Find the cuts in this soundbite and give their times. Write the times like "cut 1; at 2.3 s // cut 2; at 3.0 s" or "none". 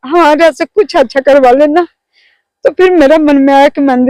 none

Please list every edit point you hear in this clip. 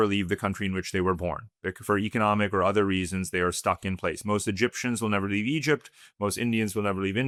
none

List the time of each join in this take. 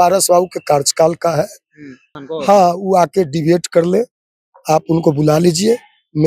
cut 1; at 2.2 s

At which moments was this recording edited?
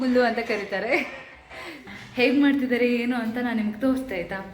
cut 1; at 1.8 s

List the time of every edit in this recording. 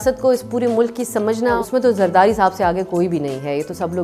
cut 1; at 1.6 s

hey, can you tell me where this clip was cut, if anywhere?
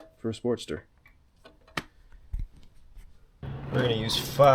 cut 1; at 3.4 s

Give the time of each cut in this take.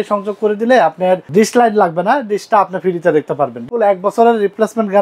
cut 1; at 1.2 s // cut 2; at 3.7 s

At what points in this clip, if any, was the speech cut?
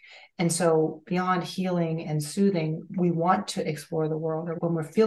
cut 1; at 2.9 s

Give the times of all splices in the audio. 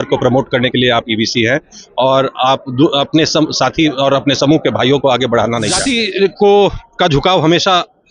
cut 1; at 5.8 s

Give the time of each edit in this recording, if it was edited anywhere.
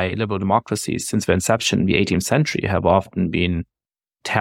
none

